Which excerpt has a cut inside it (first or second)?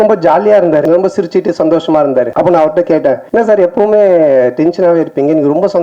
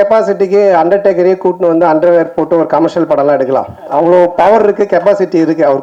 first